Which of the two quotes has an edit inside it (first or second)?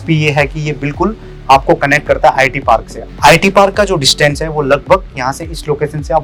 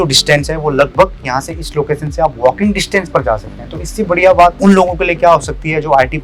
second